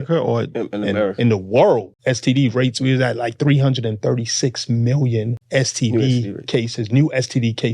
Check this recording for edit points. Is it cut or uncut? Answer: cut